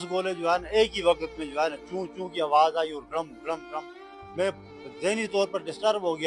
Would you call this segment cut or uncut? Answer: uncut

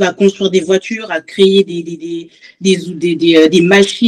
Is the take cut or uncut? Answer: uncut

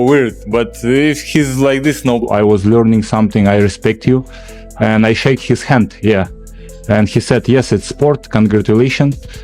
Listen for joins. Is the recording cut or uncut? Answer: cut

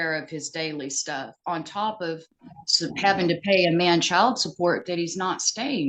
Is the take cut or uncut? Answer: uncut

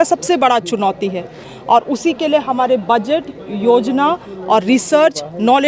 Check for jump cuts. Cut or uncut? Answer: uncut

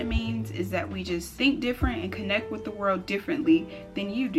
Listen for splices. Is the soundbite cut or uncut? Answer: uncut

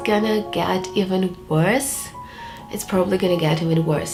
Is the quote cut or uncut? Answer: uncut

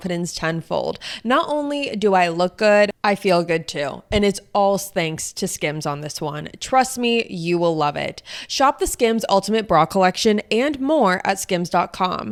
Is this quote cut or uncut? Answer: uncut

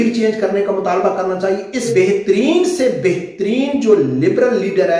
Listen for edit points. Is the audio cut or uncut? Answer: cut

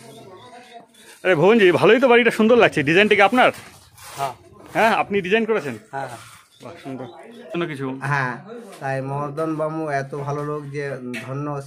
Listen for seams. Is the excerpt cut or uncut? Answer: cut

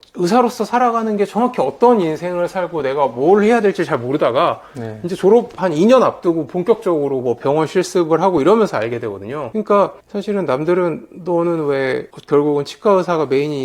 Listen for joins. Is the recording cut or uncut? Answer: uncut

